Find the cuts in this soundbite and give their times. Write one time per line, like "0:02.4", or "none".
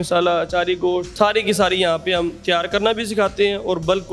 0:01.1